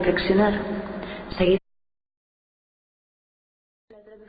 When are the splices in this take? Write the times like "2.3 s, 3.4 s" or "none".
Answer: none